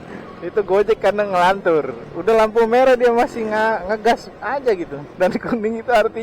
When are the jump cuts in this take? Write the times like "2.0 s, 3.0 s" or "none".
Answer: 5.1 s